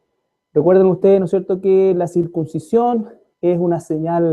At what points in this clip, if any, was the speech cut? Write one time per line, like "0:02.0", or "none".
0:03.4